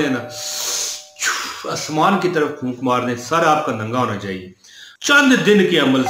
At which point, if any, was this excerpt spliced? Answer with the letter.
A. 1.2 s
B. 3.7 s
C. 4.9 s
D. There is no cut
C